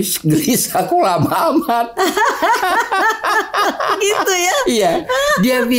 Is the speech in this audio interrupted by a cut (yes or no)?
no